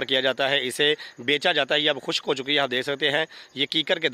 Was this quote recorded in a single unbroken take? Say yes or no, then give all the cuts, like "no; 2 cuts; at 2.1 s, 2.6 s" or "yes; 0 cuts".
yes; 0 cuts